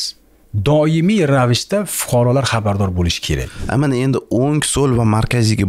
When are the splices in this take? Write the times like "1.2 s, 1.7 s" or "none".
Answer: 3.5 s

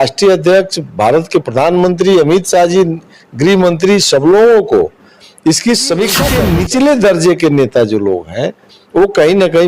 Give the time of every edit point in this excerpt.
6.3 s

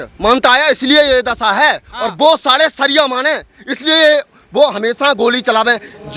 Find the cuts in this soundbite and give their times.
none

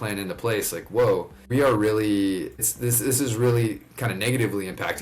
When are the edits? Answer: 1.4 s, 2.7 s

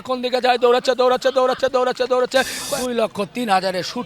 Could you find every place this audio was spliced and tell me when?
2.6 s

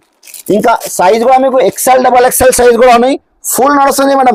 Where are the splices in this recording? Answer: none

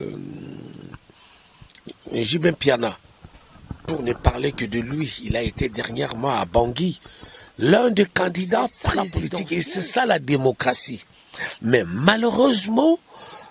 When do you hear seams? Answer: 9.2 s

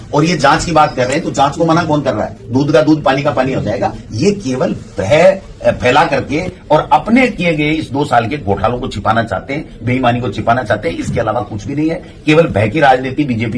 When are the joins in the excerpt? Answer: none

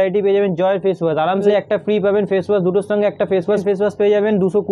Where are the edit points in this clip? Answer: 1.5 s, 3.6 s

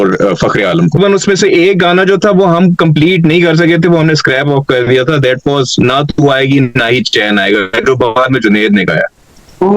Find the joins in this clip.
1.0 s

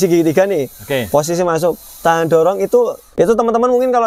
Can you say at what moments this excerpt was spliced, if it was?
3.1 s

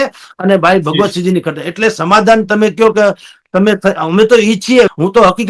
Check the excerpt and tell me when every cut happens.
none

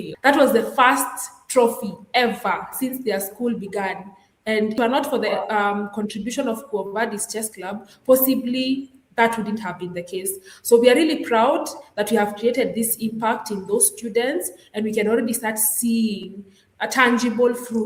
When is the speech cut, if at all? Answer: 4.7 s

